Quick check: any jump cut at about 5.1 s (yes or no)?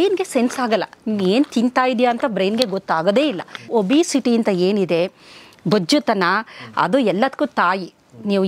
no